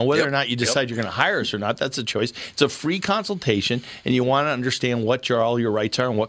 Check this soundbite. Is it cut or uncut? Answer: uncut